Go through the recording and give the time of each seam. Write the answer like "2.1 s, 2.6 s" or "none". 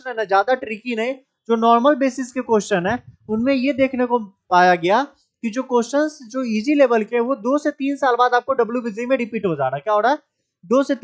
none

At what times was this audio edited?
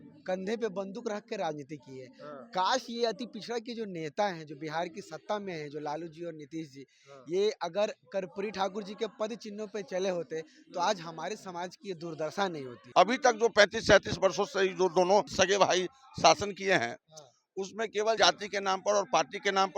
12.7 s, 15.3 s, 18.2 s

